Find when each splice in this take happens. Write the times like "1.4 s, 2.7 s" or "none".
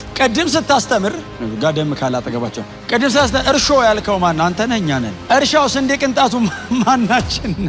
1.3 s, 2.7 s, 5.1 s